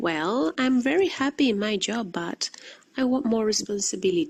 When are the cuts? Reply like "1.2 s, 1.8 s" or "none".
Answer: none